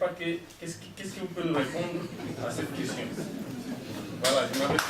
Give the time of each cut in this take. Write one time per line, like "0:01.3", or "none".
none